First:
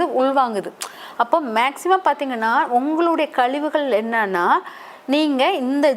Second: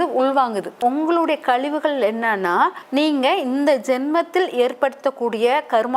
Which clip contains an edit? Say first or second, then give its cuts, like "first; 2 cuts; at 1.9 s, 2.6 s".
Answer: second; 2 cuts; at 0.8 s, 2.8 s